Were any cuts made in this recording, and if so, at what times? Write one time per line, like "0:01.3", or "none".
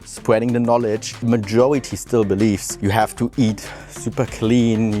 0:01.2
0:02.7

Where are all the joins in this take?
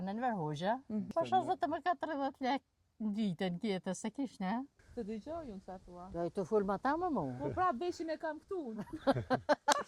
0:01.1
0:04.7

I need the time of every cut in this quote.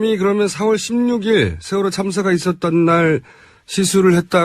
0:03.1

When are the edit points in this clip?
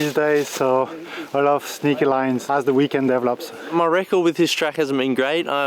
0:02.4
0:03.6

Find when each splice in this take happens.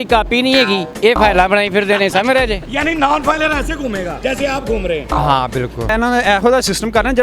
0:00.9
0:02.6
0:04.1
0:05.9

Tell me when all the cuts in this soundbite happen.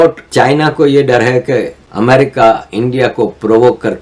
none

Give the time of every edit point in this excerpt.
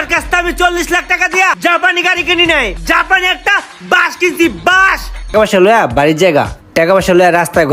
0:02.8
0:05.3

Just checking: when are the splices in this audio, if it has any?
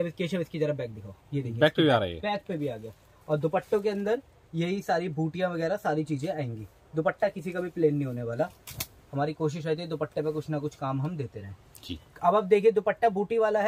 none

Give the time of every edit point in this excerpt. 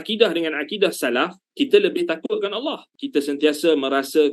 0:02.8

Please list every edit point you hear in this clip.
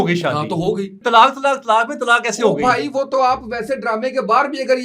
0:01.0

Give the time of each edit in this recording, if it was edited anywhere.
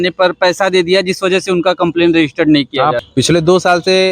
0:03.0

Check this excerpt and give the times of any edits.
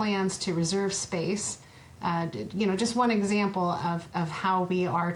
none

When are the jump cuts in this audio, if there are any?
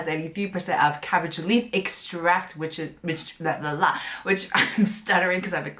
none

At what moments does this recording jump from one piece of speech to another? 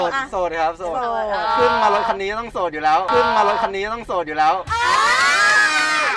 none

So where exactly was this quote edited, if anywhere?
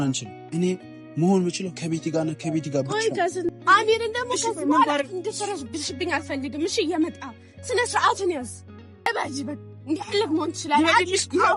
0:03.5
0:09.1

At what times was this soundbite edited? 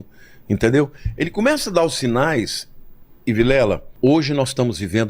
0:03.9

